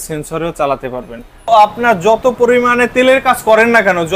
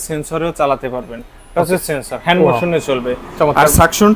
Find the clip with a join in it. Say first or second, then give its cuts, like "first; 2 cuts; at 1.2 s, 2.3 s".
first; 1 cut; at 1.5 s